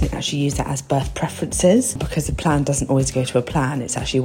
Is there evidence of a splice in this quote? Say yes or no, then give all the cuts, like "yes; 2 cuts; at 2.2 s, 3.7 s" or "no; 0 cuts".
yes; 1 cut; at 2.0 s